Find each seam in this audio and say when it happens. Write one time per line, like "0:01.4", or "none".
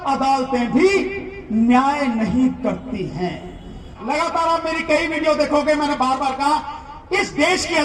0:03.9